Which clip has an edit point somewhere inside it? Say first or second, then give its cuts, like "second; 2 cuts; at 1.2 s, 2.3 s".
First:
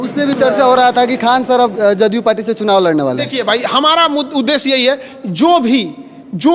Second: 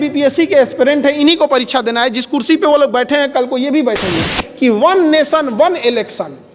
second; 1 cut; at 4.4 s